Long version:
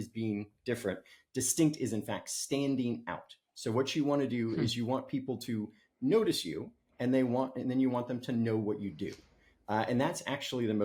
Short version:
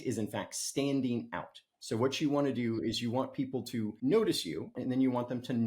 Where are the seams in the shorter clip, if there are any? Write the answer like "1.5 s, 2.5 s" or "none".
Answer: 3.9 s, 4.8 s